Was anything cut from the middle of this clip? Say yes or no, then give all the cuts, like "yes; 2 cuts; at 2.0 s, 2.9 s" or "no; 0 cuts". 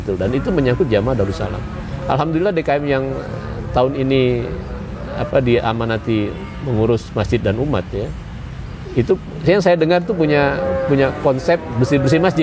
no; 0 cuts